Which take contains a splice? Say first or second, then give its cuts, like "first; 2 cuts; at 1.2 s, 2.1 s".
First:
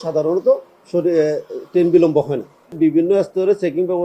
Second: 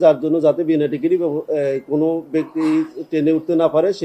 first; 1 cut; at 2.8 s